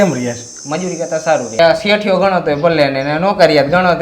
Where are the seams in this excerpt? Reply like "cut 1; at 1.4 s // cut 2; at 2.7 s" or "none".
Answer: cut 1; at 1.6 s